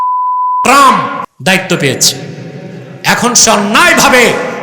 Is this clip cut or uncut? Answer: cut